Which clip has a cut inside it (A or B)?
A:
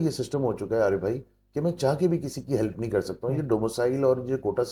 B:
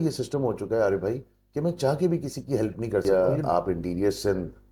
B